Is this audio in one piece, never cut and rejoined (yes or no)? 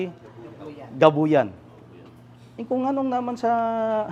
yes